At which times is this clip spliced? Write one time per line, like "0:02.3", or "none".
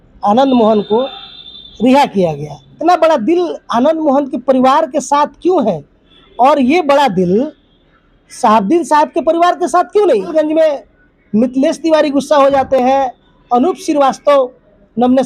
0:02.8
0:10.3